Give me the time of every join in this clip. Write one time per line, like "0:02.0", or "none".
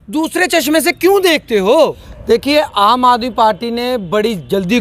0:02.1

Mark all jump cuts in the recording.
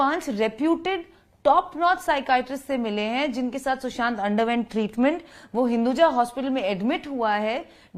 none

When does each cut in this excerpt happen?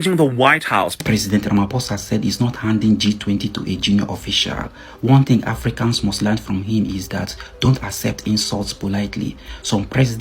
0:01.0

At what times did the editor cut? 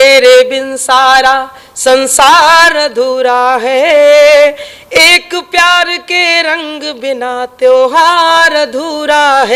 none

